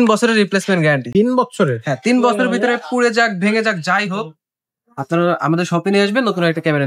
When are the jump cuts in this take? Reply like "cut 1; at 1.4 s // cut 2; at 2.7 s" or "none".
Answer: none